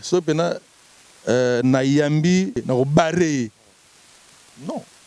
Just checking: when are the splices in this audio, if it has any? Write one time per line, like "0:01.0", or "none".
0:02.6